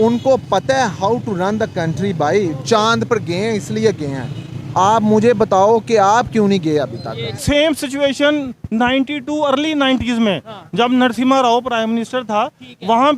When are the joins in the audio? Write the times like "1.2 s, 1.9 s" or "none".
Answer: 7.4 s